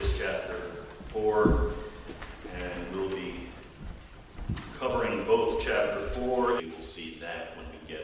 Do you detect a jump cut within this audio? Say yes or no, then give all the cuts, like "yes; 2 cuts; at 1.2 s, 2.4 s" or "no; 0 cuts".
yes; 1 cut; at 6.6 s